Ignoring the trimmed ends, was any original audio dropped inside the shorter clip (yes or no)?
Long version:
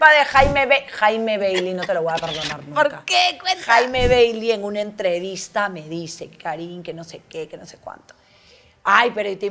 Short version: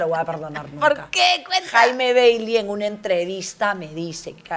no